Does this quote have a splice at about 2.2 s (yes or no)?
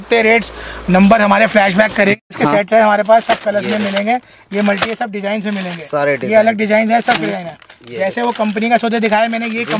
yes